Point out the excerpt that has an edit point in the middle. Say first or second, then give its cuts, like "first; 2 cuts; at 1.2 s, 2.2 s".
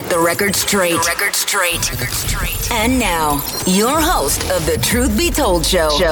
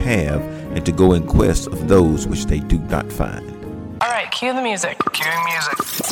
second; 1 cut; at 3.9 s